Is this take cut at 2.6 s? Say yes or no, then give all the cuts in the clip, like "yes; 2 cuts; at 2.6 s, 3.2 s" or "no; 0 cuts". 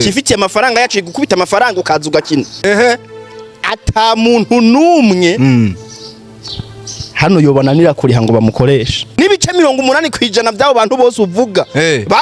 yes; 2 cuts; at 2.6 s, 9.2 s